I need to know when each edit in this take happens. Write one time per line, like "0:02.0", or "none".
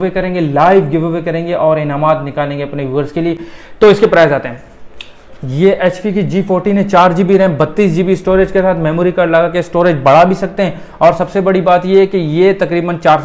none